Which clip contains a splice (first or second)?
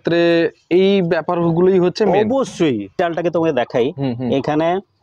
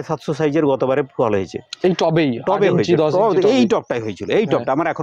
first